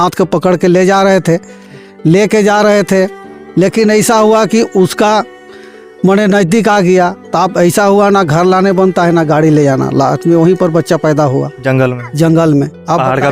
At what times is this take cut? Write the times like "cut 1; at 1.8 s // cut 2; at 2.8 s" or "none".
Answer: none